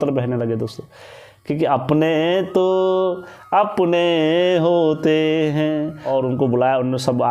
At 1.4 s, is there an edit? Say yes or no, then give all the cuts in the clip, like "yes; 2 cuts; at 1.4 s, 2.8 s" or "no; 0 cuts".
no; 1 cut; at 6.0 s